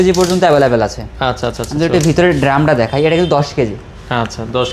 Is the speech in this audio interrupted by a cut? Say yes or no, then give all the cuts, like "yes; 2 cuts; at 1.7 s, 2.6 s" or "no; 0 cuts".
no; 0 cuts